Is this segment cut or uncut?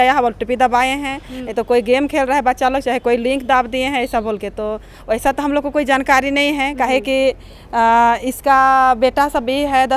uncut